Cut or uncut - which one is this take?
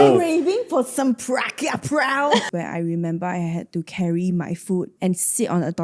cut